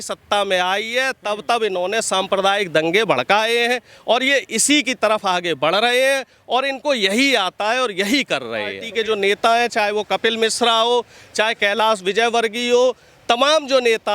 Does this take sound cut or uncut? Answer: cut